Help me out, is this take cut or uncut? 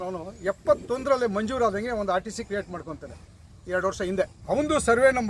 cut